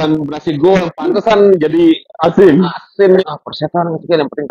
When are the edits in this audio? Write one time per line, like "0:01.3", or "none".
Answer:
0:03.3